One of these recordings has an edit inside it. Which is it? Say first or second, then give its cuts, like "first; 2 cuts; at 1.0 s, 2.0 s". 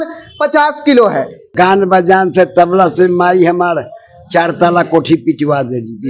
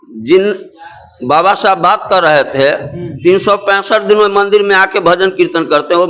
first; 1 cut; at 1.4 s